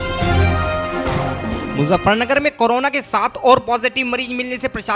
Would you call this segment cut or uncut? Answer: cut